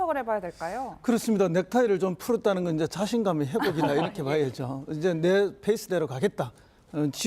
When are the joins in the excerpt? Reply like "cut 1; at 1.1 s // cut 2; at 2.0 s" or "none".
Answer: cut 1; at 5.9 s